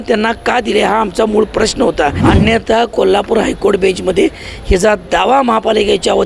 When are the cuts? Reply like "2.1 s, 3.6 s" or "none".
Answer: 2.2 s